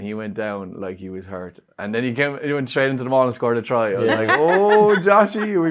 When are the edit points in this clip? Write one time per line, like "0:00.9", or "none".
none